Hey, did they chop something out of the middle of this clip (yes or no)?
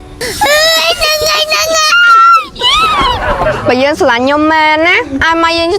no